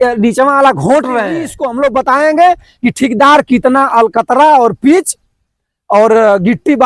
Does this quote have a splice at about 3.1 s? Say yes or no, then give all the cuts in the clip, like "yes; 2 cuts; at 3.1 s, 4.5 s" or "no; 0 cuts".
no; 1 cut; at 1.6 s